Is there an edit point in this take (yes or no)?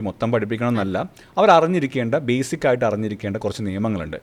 no